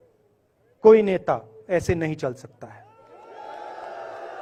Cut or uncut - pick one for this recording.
uncut